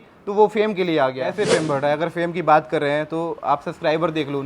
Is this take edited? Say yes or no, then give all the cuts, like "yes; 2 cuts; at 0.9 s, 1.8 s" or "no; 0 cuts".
yes; 1 cut; at 1.2 s